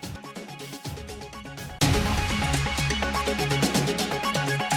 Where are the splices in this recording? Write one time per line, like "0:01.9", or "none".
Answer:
none